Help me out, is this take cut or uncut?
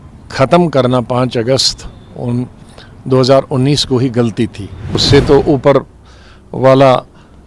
cut